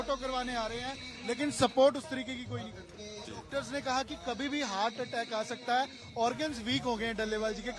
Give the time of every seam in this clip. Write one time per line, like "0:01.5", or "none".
0:03.3